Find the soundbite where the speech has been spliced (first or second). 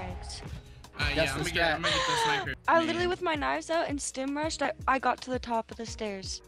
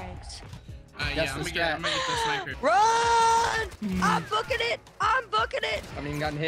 second